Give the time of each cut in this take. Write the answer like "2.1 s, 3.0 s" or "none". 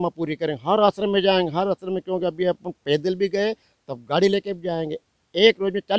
none